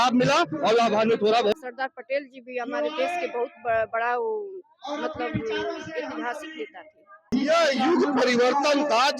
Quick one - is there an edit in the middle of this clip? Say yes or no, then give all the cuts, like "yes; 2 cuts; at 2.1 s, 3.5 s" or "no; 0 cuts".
yes; 2 cuts; at 1.5 s, 7.3 s